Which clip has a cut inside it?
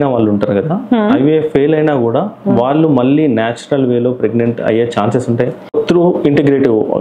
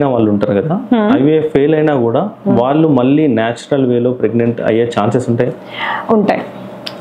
first; 1 cut; at 5.7 s

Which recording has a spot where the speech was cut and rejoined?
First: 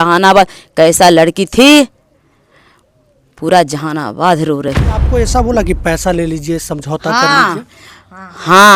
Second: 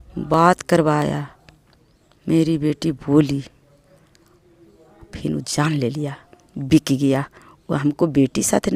first; 1 cut; at 5.1 s

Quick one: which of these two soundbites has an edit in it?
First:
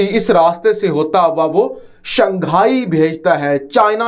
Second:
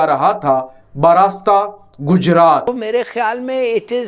second; 1 cut; at 2.9 s

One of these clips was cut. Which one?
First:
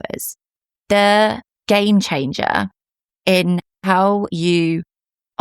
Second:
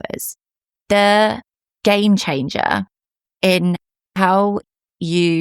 first; 2 cuts; at 1.5 s, 3.9 s

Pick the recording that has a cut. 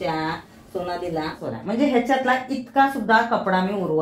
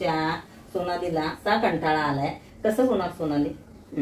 first; 1 cut; at 1.4 s

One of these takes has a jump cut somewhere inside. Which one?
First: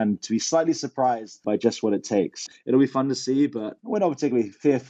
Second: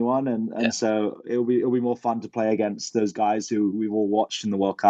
first; 3 cuts; at 1.4 s, 2.4 s, 3.7 s

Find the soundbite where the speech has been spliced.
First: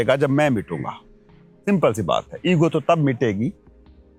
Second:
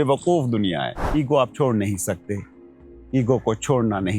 second; 1 cut; at 1.0 s

